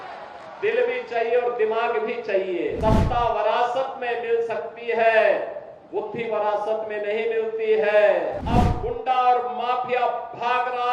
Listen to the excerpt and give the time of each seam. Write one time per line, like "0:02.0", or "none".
0:02.8
0:08.4